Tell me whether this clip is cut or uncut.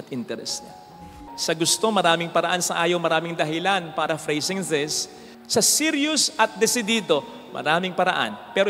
cut